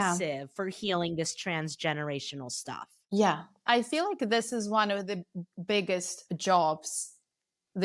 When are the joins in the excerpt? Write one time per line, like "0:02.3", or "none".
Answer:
0:03.6